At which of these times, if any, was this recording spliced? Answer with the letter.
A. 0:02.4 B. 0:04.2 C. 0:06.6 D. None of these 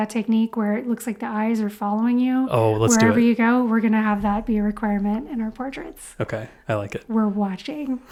D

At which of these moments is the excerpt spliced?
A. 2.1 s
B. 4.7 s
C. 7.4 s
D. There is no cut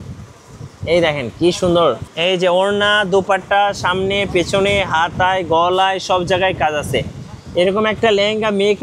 A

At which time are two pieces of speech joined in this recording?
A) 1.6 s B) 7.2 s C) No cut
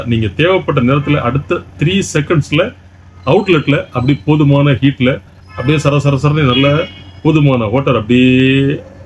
C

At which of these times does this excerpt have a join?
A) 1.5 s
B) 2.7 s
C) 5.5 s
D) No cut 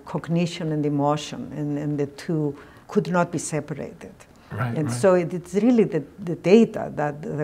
B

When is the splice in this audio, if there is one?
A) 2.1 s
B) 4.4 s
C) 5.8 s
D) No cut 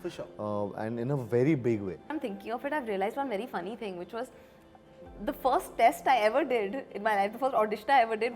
A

